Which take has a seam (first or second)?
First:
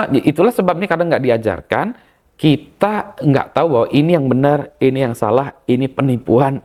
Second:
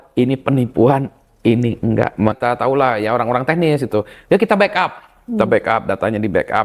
second